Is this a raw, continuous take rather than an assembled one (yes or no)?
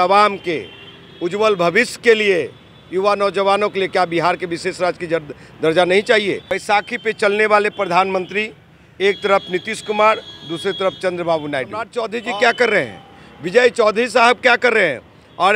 no